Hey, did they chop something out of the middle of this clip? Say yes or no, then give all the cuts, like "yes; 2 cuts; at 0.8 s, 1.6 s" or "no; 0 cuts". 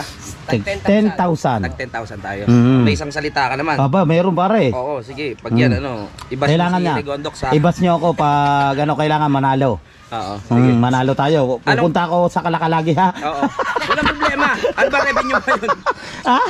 no; 0 cuts